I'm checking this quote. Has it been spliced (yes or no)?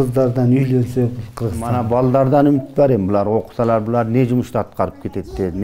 yes